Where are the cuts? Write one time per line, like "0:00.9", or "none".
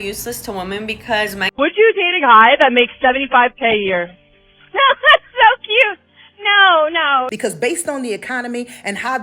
0:01.4
0:07.3